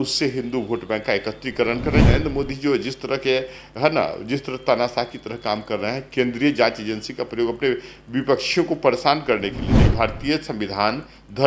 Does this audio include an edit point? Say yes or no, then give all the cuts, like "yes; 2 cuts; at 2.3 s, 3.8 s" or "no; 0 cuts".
yes; 2 cuts; at 2.0 s, 9.9 s